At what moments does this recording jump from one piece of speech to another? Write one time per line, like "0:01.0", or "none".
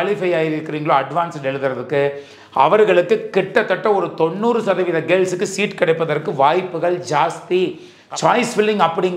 0:07.8